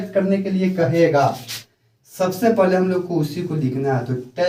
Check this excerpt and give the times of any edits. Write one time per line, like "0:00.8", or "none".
none

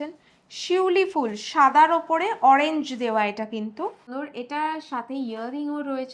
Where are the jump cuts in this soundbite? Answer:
0:04.1

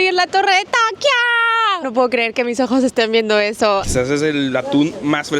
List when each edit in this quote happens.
0:01.8
0:03.9

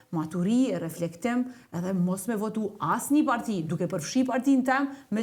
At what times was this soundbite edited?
none

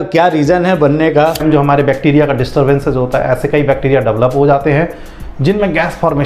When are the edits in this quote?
0:01.4

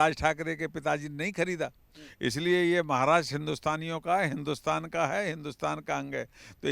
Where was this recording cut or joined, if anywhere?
none

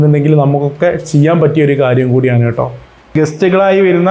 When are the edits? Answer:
0:03.1

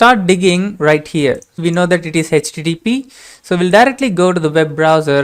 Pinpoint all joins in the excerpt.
0:01.6

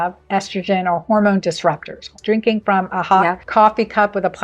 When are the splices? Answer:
0:02.2
0:03.4

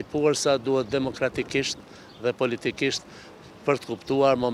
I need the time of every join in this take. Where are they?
none

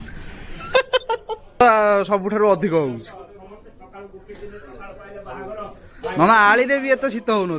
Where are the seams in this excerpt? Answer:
0:01.6

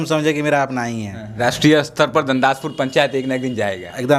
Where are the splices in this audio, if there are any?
0:01.3

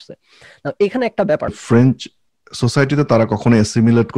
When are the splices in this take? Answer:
0:01.6

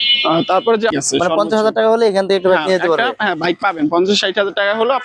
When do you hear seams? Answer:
0:00.9

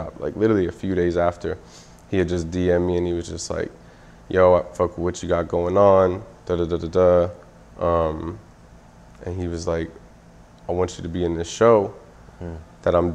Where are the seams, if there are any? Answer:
none

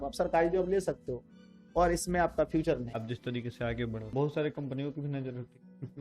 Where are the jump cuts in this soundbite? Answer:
0:02.9
0:04.1

